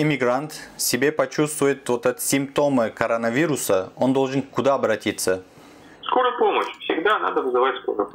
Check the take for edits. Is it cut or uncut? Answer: uncut